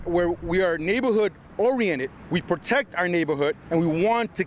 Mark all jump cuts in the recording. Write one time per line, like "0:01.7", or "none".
0:02.2
0:03.6